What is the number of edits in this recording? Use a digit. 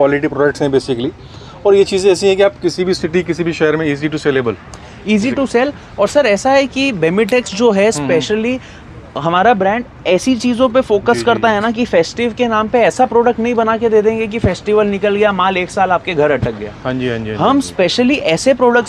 0